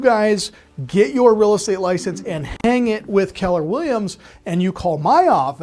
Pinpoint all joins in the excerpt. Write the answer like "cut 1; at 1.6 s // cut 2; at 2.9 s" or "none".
none